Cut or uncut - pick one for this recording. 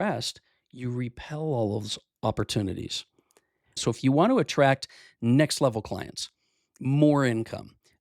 cut